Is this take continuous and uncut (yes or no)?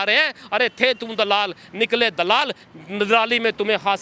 yes